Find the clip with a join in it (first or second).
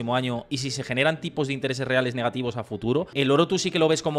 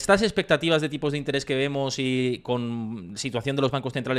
first